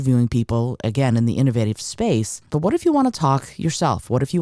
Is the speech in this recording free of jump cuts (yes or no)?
no